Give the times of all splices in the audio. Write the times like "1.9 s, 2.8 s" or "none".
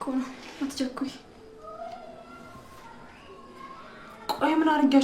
1.4 s